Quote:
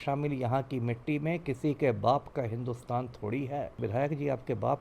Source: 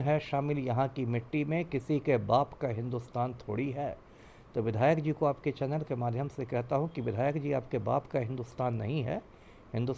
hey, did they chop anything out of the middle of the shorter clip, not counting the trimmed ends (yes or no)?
yes